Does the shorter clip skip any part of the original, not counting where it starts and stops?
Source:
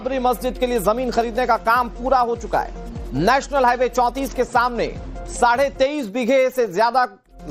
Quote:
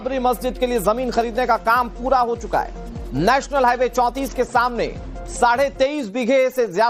no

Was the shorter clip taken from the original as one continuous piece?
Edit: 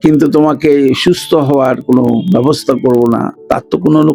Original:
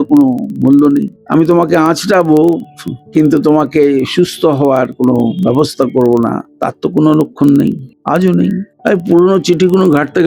yes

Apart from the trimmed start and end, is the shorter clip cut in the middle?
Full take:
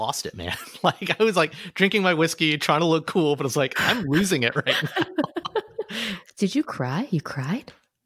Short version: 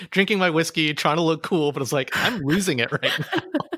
no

